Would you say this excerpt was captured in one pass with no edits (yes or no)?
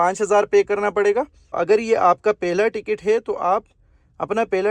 no